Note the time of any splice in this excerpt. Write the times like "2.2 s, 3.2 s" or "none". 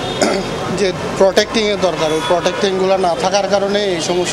none